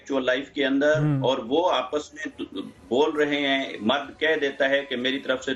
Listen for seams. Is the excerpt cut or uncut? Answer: uncut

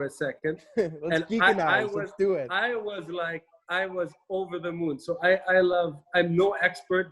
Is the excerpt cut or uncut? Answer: uncut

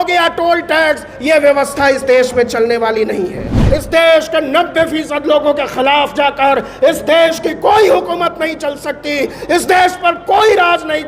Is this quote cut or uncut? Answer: cut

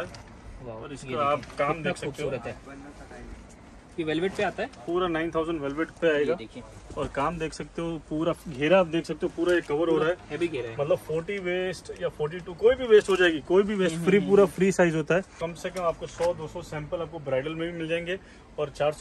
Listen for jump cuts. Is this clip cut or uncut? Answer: cut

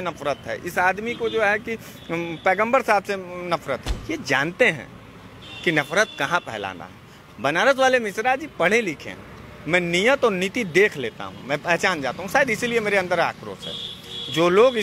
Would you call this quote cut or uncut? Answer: uncut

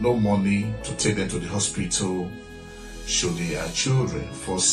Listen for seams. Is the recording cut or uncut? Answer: uncut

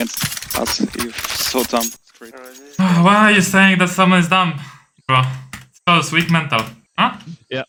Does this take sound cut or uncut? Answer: uncut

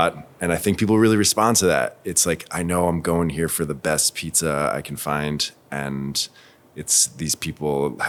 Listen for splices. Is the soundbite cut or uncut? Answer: uncut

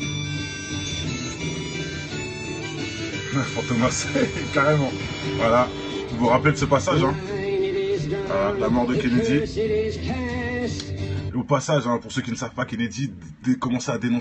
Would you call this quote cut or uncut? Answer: uncut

